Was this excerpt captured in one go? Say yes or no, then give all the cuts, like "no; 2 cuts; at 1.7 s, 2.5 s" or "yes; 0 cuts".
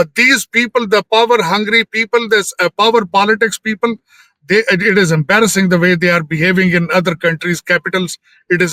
yes; 0 cuts